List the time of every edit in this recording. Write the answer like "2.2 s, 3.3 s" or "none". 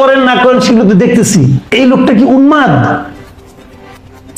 1.7 s